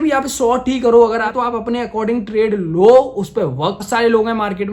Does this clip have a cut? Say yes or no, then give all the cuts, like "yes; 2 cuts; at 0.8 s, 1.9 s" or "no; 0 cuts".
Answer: yes; 2 cuts; at 1.3 s, 3.8 s